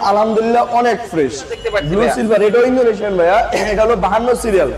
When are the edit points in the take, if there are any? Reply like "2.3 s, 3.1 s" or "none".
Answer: 1.6 s